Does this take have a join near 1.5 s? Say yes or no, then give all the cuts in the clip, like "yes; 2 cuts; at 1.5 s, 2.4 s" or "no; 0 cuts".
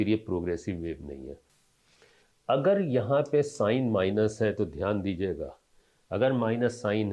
yes; 1 cut; at 1.5 s